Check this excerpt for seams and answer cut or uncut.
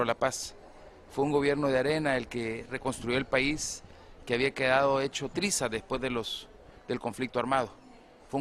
uncut